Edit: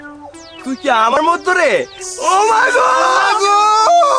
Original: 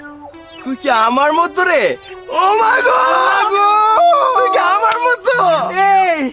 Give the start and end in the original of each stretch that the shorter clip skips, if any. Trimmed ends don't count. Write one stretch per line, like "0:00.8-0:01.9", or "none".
0:01.2-0:01.3